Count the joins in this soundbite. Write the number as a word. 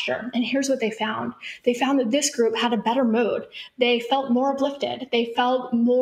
zero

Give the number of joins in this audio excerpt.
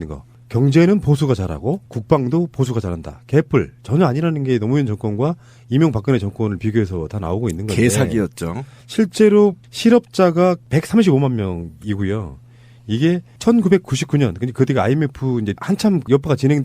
one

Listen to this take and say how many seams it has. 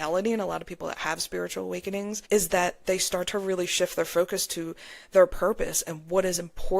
one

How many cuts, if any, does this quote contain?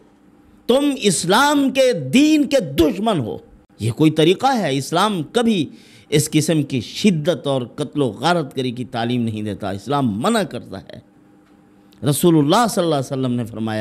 zero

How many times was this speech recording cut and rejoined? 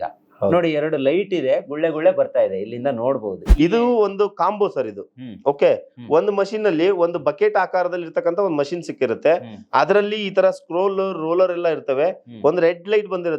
one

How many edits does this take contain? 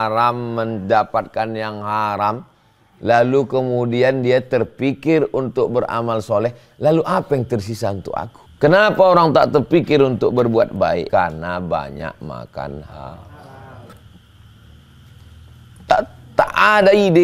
two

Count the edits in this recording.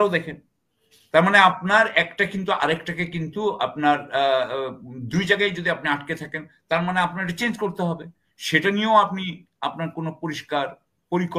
zero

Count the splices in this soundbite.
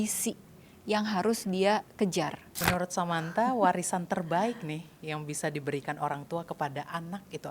one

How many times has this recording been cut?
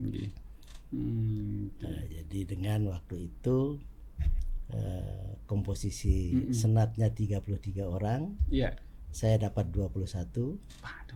zero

